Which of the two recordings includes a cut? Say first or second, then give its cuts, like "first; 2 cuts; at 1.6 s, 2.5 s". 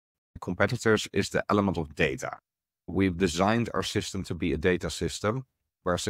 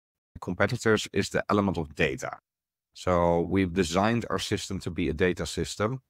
first; 1 cut; at 2.9 s